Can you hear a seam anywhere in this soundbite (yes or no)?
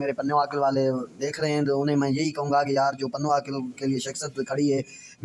no